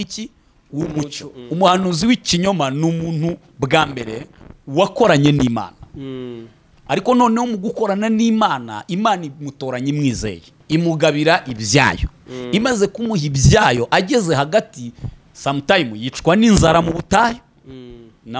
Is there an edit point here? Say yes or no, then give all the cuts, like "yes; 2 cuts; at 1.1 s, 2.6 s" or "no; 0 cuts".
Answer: yes; 2 cuts; at 1.3 s, 10.5 s